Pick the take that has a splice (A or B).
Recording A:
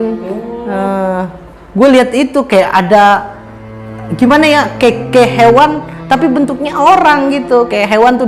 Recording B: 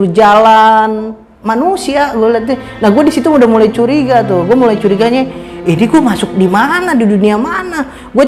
B